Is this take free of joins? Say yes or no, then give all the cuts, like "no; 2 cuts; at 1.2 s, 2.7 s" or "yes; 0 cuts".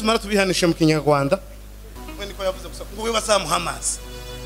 no; 1 cut; at 2.0 s